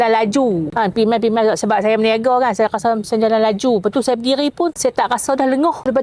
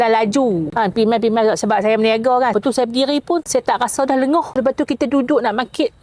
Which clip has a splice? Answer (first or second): second